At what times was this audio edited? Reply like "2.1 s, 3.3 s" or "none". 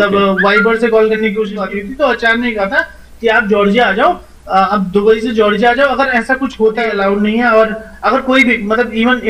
1.6 s, 6.9 s